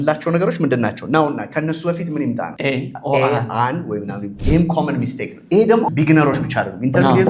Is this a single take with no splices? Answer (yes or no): no